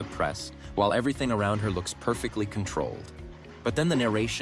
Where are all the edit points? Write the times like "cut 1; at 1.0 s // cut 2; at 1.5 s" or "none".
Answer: none